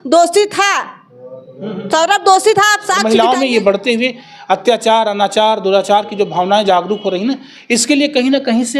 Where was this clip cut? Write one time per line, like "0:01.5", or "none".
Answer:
0:03.0